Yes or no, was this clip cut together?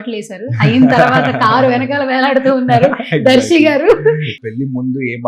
yes